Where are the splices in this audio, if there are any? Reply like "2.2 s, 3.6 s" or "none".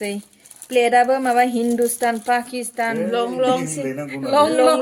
none